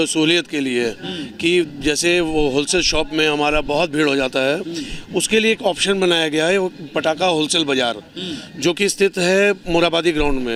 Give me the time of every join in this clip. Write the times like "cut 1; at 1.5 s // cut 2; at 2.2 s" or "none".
none